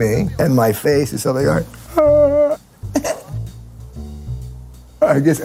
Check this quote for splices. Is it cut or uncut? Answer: uncut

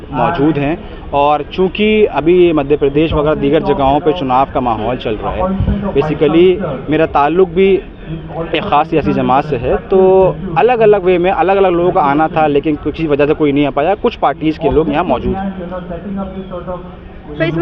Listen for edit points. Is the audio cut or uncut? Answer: uncut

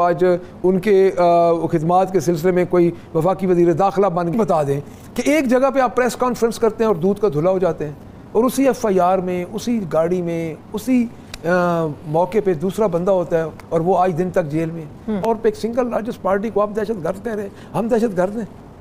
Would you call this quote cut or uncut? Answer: cut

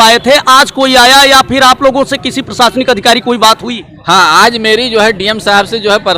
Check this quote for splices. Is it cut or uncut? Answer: uncut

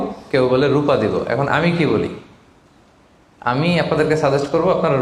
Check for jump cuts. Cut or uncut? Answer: uncut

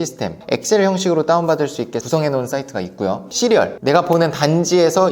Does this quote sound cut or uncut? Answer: cut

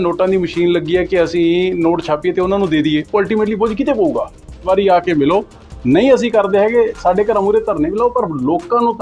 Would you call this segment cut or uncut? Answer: cut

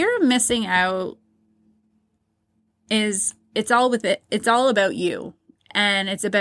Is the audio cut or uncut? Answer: uncut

